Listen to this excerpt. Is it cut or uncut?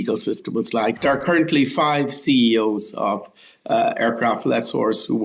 cut